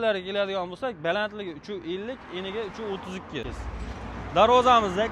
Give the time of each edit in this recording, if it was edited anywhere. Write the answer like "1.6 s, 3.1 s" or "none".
3.5 s